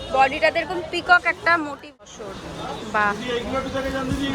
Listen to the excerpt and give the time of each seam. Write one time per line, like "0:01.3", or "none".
0:02.0